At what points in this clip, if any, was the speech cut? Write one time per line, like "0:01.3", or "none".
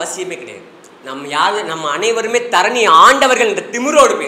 none